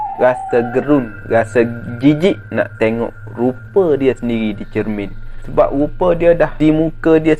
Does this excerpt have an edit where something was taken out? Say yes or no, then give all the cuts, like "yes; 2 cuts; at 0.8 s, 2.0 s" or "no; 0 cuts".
yes; 2 cuts; at 5.3 s, 6.5 s